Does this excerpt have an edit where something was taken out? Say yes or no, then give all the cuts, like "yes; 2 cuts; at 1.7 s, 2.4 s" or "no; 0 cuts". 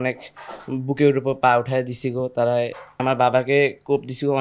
yes; 1 cut; at 3.0 s